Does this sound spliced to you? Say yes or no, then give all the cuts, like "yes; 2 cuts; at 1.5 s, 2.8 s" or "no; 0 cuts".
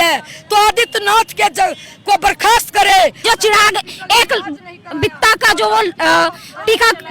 yes; 1 cut; at 3.2 s